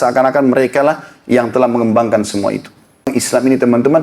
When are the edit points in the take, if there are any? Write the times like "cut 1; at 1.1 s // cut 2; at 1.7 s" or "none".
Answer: cut 1; at 3.1 s